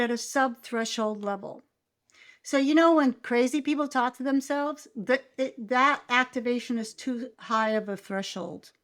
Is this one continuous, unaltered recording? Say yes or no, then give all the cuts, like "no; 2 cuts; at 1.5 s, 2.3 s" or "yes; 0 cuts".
yes; 0 cuts